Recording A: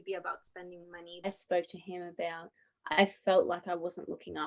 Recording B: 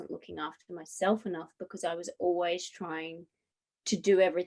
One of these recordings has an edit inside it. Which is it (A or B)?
A